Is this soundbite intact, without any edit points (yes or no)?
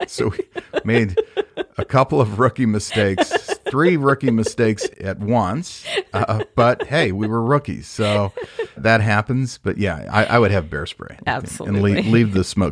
no